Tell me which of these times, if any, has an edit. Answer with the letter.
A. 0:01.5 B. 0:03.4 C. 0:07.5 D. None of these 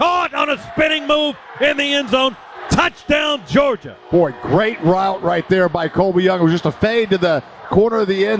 D